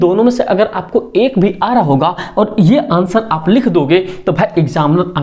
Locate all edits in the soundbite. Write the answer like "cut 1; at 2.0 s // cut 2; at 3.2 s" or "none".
none